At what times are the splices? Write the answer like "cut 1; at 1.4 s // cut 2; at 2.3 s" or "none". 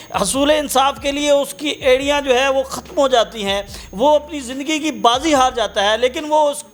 none